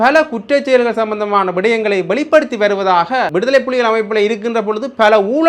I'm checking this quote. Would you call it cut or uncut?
cut